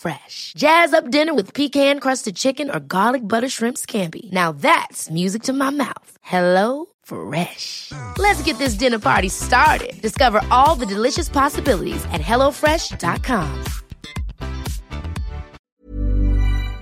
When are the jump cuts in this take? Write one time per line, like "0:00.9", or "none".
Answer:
0:15.5